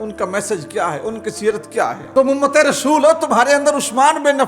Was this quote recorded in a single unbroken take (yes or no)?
no